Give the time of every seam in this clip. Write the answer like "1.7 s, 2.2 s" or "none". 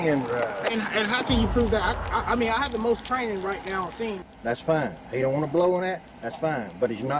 4.1 s